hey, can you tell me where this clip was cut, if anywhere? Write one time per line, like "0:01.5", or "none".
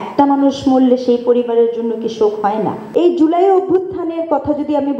0:02.8